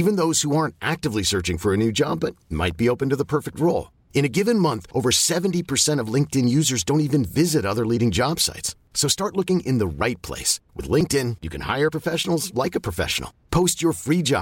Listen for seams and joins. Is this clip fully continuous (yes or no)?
yes